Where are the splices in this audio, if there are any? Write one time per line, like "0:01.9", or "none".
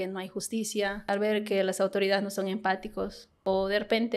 0:01.1
0:03.2

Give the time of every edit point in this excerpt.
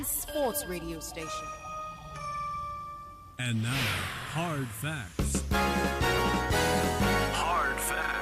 0:03.2

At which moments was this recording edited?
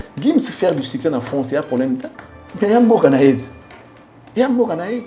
none

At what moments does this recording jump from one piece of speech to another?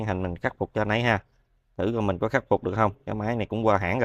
none

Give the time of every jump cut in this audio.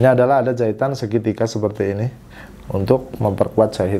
none

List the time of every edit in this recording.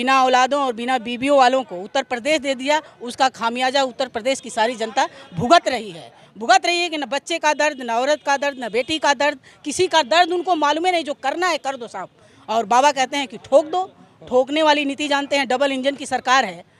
none

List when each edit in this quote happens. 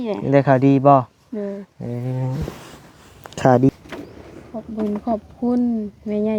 0:03.7

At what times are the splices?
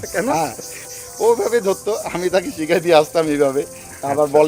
none

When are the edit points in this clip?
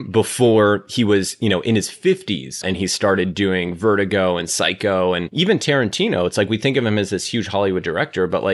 0:02.6
0:05.3

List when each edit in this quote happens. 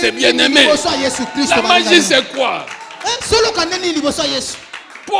none

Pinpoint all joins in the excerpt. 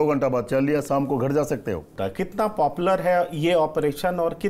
0:01.9

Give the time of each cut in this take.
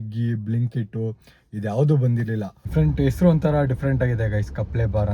0:02.7

